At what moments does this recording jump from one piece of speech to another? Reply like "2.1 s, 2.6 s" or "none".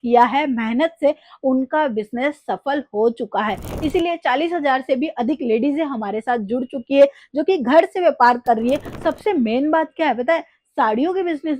8.9 s